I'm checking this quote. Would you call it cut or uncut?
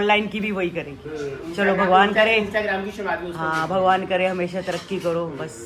uncut